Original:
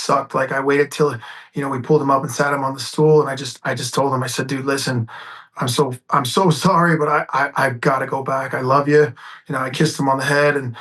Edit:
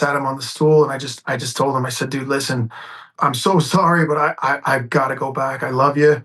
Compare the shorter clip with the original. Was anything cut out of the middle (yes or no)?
yes